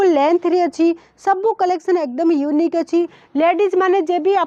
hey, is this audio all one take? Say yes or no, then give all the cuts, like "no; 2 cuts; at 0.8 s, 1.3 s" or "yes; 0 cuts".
yes; 0 cuts